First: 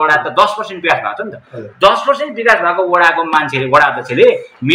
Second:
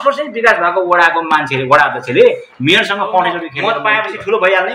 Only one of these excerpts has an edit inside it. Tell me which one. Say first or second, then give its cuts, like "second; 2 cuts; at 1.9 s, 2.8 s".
second; 1 cut; at 3.8 s